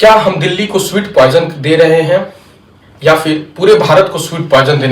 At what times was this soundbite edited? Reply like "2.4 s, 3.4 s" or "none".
none